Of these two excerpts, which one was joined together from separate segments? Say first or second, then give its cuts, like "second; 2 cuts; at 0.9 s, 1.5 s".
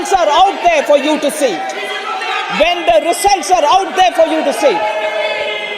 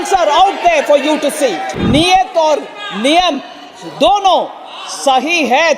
second; 1 cut; at 1.7 s